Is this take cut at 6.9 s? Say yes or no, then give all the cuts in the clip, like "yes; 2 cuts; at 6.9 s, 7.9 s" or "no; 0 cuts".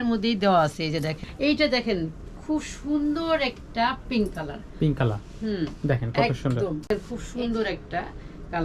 yes; 2 cuts; at 1.2 s, 6.9 s